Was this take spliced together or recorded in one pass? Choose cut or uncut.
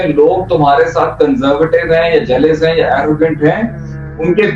uncut